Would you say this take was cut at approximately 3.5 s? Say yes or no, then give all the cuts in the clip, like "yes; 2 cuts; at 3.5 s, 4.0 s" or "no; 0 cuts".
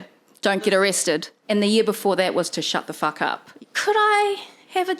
yes; 2 cuts; at 1.4 s, 3.5 s